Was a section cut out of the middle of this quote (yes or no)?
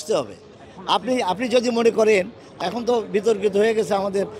yes